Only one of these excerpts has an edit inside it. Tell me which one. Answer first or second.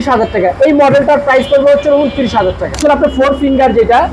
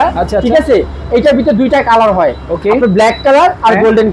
first